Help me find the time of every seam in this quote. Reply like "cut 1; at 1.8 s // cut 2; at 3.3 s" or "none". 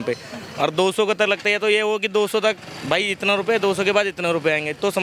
none